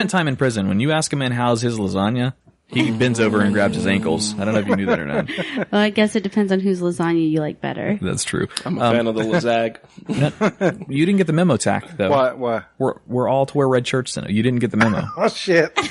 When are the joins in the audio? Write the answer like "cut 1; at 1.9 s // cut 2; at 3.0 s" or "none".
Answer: cut 1; at 3.8 s